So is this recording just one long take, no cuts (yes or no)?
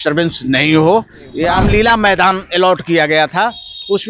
no